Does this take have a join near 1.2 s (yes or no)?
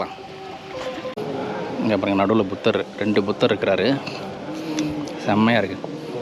yes